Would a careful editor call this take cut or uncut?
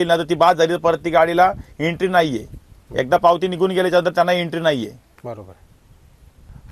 uncut